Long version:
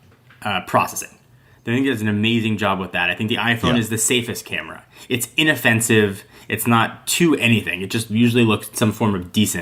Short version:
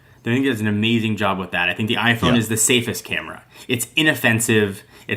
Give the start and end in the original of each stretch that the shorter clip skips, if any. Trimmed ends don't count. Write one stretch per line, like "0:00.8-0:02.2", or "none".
none